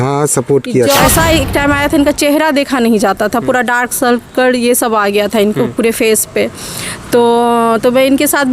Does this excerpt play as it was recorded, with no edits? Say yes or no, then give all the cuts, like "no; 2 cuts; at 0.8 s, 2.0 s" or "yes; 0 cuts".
no; 1 cut; at 1.0 s